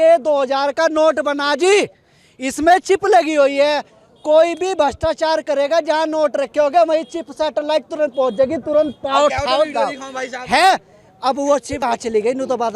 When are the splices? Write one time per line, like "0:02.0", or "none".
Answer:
0:11.8